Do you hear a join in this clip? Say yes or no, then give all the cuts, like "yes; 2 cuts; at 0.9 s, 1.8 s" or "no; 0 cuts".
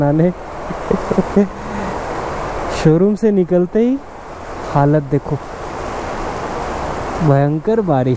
no; 0 cuts